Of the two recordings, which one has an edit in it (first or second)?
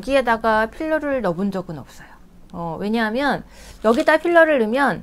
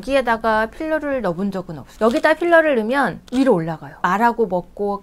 second